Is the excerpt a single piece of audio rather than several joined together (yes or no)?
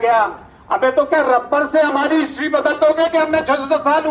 yes